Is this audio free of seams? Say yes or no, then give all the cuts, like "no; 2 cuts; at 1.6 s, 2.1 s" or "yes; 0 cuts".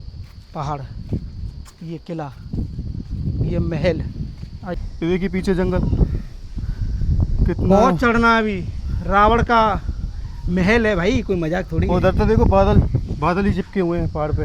no; 1 cut; at 4.8 s